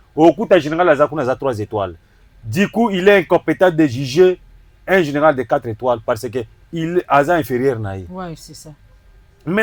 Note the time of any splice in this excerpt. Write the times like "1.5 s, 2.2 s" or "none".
none